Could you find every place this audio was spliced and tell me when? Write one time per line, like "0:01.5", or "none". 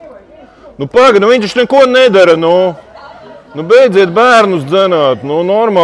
none